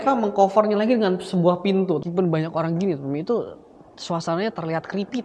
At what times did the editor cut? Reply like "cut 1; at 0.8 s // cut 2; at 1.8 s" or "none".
cut 1; at 2.0 s